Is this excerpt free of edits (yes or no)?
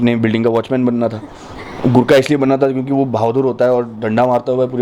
yes